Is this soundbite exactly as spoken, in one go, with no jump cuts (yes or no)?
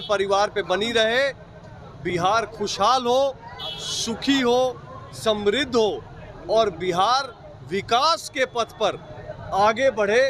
yes